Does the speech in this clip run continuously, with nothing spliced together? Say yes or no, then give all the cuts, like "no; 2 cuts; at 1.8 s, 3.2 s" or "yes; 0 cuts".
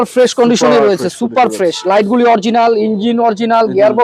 yes; 0 cuts